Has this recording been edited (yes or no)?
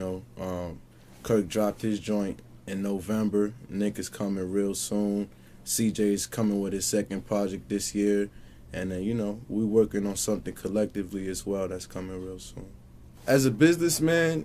no